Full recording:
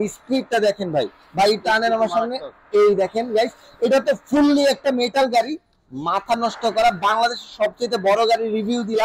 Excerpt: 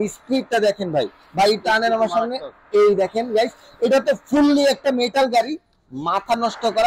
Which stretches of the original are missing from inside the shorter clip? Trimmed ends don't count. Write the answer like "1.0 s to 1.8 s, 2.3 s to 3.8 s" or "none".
none